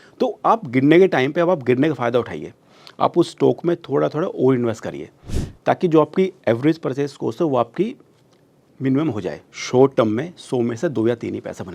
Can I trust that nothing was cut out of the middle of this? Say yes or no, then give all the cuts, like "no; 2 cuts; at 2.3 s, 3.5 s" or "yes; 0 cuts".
no; 1 cut; at 9.5 s